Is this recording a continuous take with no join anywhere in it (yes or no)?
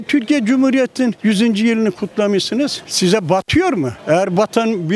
yes